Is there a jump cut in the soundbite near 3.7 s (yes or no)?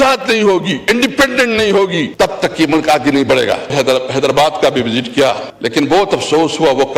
yes